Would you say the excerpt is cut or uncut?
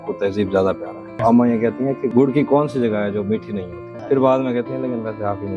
cut